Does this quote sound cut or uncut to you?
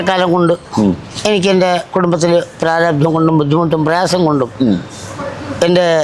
uncut